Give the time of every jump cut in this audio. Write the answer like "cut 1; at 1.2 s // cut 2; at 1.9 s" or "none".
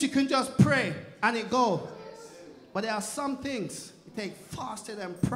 none